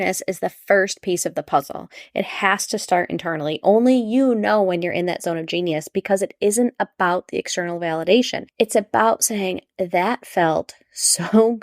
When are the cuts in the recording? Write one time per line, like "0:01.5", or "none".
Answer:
0:08.4

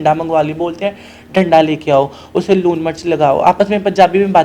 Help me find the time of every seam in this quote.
none

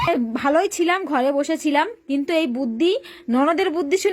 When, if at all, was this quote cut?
none

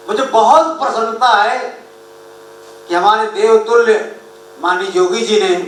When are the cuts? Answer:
none

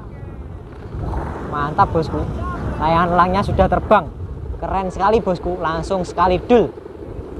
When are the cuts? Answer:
none

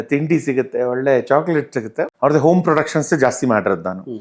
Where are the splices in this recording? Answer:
0:02.0

